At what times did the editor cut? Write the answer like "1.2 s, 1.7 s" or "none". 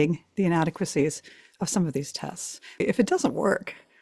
2.8 s

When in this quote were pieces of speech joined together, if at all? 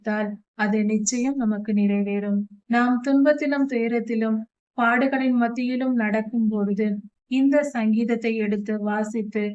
2.5 s

